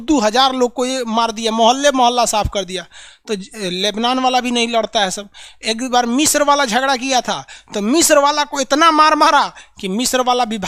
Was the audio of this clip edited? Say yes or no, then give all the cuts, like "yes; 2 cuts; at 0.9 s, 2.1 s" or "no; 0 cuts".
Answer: no; 0 cuts